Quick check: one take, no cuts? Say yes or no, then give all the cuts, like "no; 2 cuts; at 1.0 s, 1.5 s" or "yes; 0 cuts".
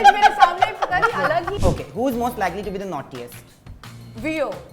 no; 1 cut; at 1.6 s